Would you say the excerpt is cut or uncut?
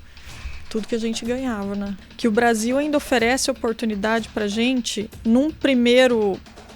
cut